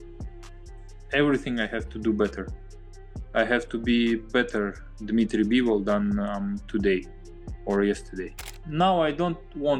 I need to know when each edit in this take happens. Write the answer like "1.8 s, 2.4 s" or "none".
1.0 s, 8.4 s